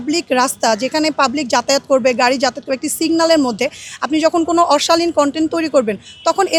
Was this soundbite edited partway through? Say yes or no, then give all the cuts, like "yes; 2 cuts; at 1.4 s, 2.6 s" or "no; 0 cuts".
no; 0 cuts